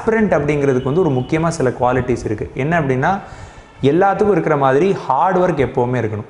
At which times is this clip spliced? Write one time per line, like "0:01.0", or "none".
none